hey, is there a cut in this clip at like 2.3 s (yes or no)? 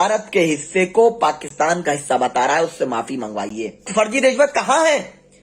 no